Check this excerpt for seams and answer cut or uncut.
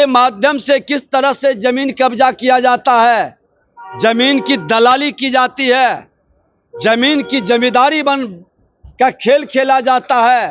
uncut